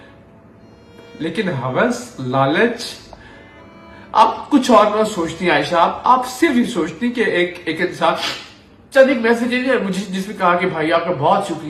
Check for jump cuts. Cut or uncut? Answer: uncut